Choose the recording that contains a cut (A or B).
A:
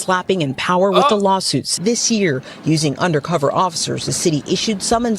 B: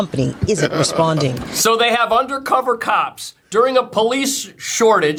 A